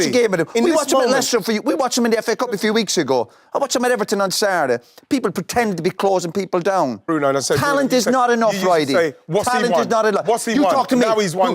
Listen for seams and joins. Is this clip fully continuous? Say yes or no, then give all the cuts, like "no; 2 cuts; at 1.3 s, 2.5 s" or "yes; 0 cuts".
no; 1 cut; at 7.0 s